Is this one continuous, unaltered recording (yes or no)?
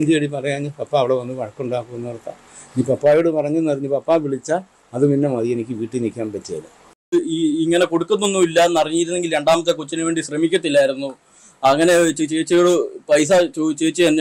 no